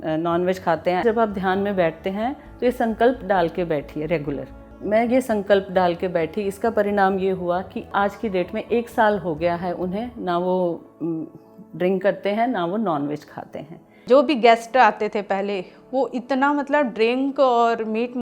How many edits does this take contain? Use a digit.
4